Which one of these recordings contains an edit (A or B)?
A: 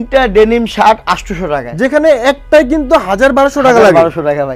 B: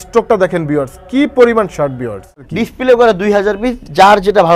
B